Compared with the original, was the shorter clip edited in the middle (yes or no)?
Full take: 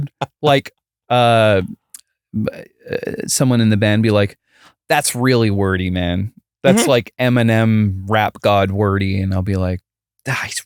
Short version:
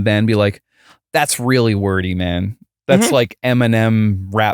no